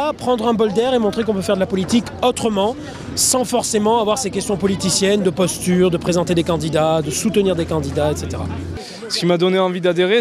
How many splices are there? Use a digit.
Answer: 1